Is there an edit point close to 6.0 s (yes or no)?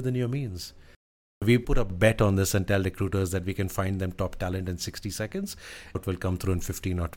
yes